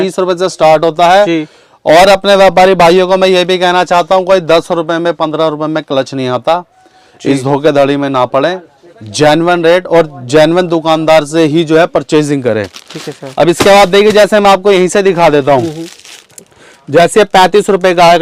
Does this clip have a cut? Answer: no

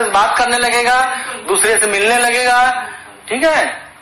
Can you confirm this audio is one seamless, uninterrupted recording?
yes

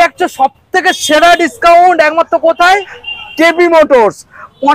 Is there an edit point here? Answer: no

